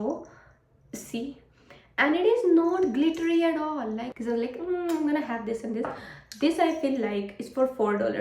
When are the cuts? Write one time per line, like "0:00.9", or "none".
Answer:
0:04.1